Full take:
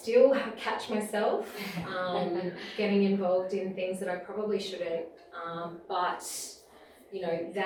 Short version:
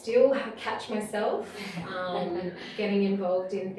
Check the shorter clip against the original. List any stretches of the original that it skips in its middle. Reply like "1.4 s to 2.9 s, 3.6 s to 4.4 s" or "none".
none